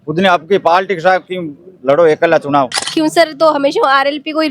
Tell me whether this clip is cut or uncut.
cut